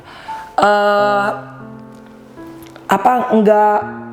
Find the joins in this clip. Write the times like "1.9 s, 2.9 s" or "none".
1.4 s, 2.8 s